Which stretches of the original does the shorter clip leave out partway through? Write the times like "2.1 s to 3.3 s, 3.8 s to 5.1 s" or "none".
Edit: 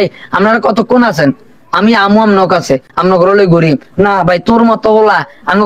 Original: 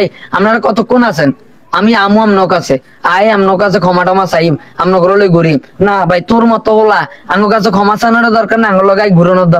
2.9 s to 4.7 s